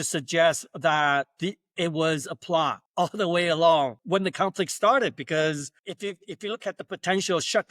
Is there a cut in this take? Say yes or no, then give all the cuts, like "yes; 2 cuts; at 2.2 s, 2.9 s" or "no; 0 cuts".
yes; 3 cuts; at 2.8 s, 4.0 s, 5.7 s